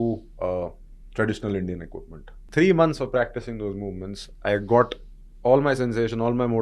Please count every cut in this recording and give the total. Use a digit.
1